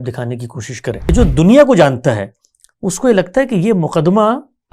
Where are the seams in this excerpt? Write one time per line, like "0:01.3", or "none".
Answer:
0:01.1